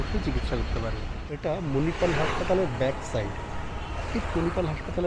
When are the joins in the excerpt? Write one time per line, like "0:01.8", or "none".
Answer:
0:01.3